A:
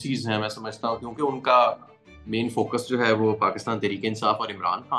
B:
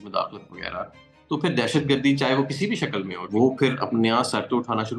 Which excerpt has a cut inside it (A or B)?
B